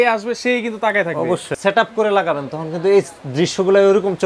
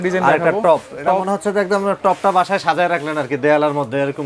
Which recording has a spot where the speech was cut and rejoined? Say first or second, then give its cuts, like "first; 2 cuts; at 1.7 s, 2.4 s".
first; 1 cut; at 1.5 s